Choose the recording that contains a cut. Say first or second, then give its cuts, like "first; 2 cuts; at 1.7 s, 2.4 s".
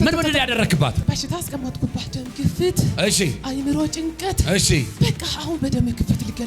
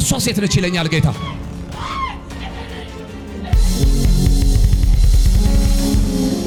first; 3 cuts; at 1.0 s, 2.1 s, 4.9 s